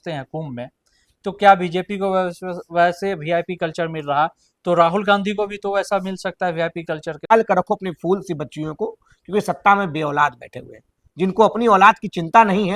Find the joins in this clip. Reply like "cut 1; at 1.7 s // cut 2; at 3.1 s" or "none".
cut 1; at 7.3 s